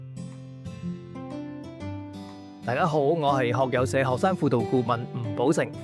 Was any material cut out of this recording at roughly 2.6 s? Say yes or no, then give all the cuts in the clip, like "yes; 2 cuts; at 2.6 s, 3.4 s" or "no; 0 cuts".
yes; 1 cut; at 2.6 s